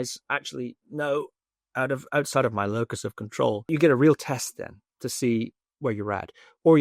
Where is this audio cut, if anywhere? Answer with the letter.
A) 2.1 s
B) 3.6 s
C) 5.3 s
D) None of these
B